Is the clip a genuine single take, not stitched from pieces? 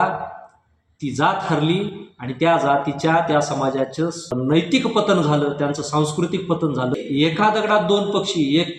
no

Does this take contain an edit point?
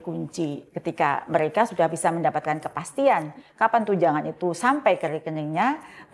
no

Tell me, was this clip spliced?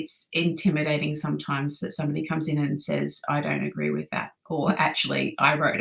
no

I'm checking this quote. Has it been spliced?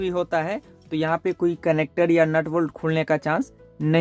no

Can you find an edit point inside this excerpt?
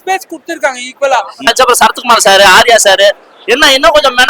yes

